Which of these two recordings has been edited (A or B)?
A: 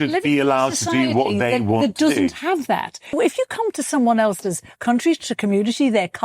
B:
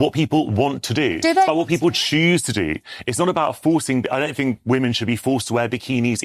A